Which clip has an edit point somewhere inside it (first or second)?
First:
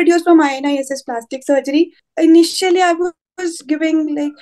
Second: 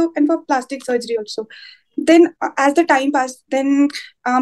first